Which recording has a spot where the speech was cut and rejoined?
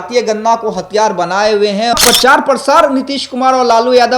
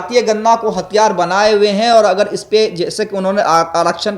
first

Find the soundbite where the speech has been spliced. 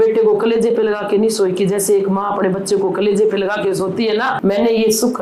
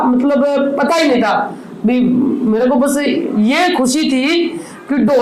first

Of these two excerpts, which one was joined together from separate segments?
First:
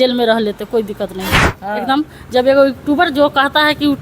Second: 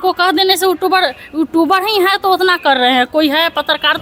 first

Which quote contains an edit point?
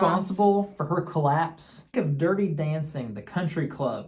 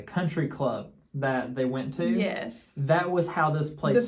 first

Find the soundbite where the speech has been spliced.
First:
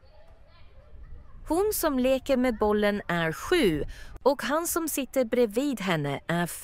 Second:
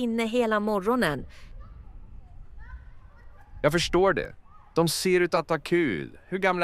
first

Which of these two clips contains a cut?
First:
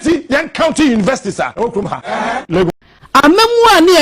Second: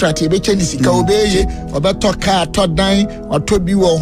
first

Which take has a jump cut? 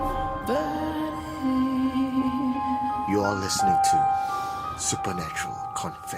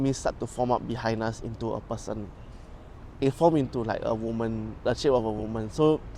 second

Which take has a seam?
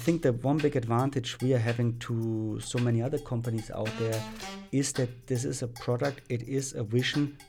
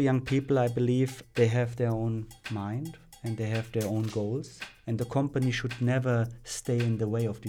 second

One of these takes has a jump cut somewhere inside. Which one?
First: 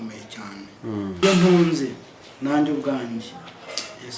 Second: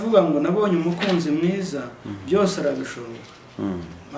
first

